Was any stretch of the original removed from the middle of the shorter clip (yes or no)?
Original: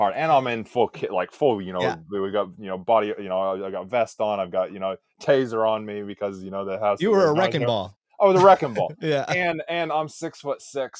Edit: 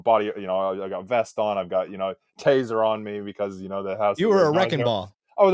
no